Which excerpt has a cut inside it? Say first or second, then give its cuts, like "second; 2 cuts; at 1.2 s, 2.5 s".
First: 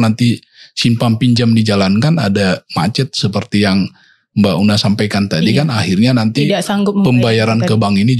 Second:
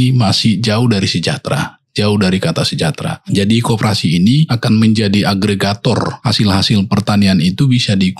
second; 3 cuts; at 3.1 s, 4.6 s, 6.2 s